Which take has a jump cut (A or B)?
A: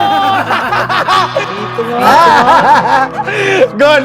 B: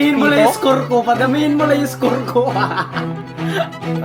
A